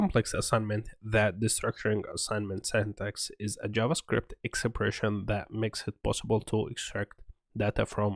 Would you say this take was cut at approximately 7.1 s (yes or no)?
no